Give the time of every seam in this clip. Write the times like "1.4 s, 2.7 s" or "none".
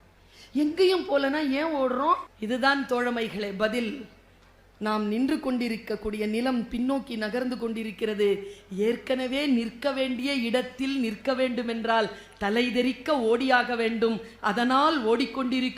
2.3 s